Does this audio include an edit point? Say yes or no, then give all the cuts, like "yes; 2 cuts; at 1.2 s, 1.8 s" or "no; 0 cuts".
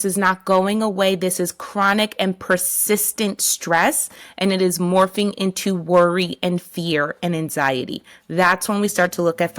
no; 0 cuts